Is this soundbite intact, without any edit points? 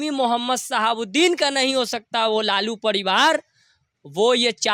yes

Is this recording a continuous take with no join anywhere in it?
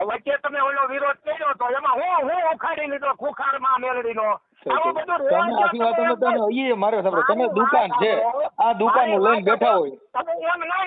yes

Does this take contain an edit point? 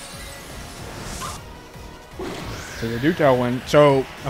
yes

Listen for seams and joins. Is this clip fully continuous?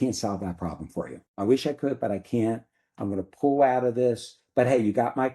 no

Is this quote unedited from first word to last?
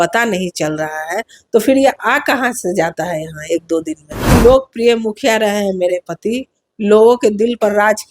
no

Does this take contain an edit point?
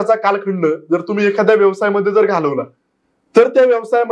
no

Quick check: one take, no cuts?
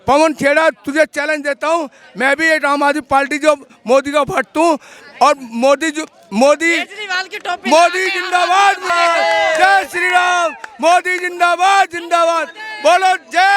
no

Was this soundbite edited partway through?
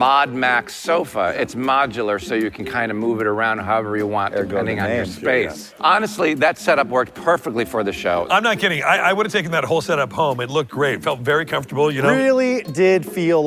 yes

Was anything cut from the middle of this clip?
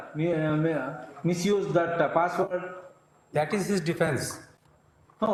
no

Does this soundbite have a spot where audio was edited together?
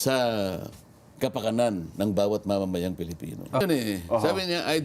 yes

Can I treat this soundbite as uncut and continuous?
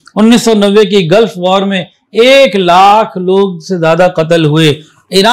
yes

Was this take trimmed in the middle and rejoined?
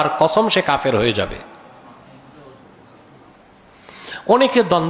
no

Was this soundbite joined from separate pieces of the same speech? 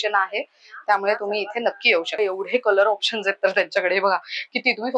yes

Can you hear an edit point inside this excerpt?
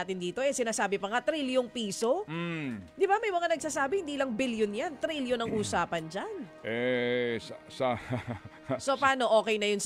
no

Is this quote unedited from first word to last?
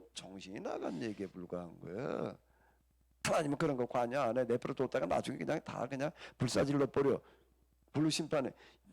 no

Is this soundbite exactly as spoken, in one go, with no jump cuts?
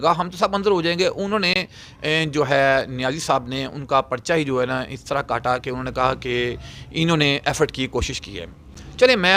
yes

